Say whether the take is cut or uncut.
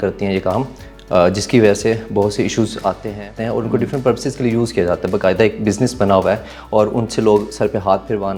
cut